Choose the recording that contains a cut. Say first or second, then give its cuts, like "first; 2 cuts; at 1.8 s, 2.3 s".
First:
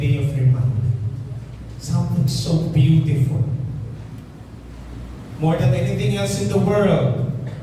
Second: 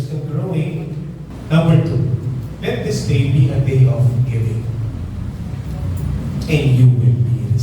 second; 1 cut; at 1.2 s